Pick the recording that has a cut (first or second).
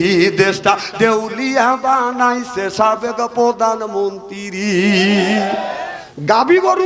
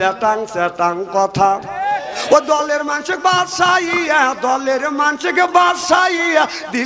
first